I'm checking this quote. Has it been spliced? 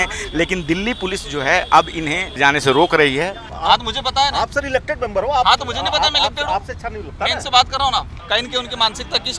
yes; 3 cuts; at 2.4 s, 3.5 s, 8.1 s

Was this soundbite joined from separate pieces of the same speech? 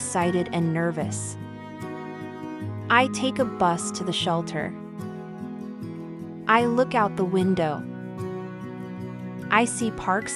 yes; 4 cuts; at 4.6 s, 5.9 s, 7.8 s, 9.3 s

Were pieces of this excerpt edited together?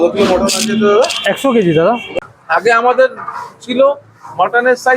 yes; 1 cut; at 2.1 s

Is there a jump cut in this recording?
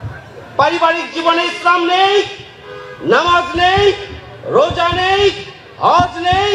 no; 0 cuts

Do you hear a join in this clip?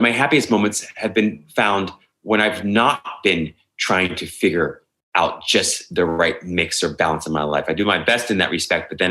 no; 0 cuts

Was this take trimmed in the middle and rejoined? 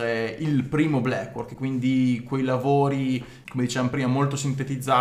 no; 0 cuts

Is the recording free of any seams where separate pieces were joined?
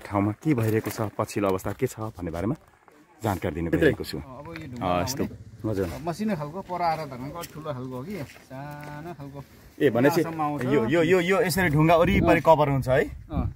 no; 1 cut; at 5.3 s

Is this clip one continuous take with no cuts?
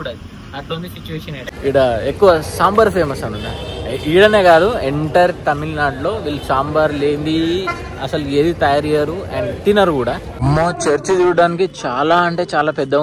no; 2 cuts; at 1.5 s, 10.3 s

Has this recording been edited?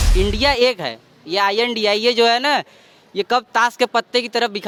no; 0 cuts

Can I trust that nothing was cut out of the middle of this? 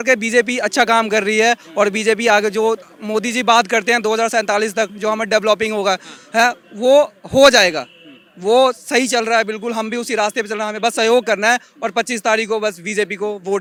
yes; 0 cuts

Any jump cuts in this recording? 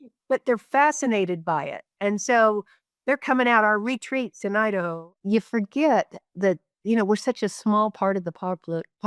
yes; 1 cut; at 5.0 s

